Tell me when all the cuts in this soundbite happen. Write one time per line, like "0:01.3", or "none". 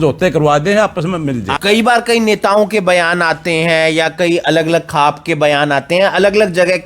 0:01.5